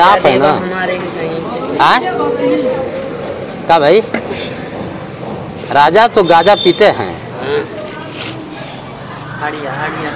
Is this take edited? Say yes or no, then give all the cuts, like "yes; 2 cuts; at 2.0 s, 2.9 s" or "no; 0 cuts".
no; 0 cuts